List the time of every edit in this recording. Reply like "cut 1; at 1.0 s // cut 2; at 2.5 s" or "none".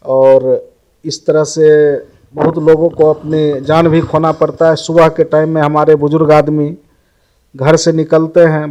none